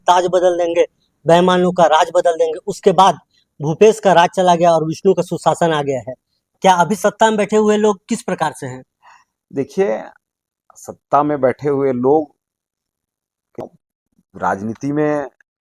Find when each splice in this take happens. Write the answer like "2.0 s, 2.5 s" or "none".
13.6 s